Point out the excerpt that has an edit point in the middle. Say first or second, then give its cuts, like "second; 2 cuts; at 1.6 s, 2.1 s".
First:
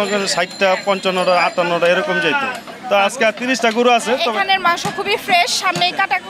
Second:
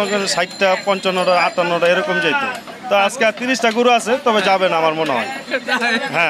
first; 1 cut; at 4.3 s